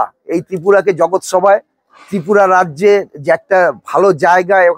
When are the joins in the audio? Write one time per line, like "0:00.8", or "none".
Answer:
none